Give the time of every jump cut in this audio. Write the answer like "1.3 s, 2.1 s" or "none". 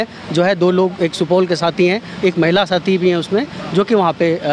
none

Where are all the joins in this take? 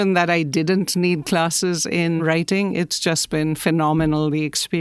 2.2 s

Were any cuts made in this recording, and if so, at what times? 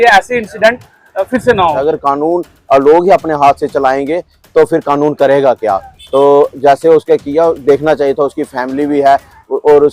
1.8 s

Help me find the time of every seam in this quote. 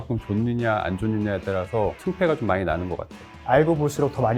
3.4 s

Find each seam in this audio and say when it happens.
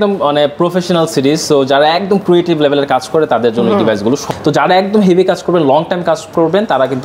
4.2 s

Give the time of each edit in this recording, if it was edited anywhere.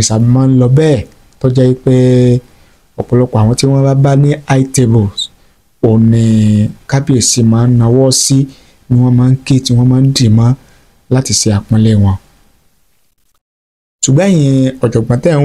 none

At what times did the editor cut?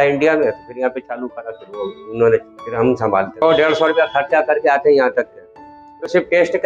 3.4 s

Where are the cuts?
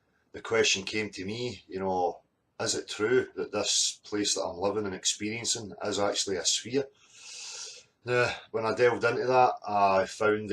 1.3 s

